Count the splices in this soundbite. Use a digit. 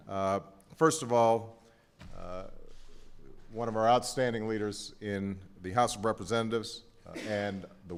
0